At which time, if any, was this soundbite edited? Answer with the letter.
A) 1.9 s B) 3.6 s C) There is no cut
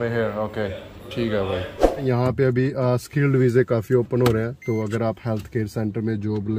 A